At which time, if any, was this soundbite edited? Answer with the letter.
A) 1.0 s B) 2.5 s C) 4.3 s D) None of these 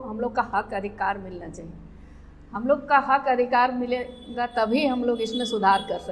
D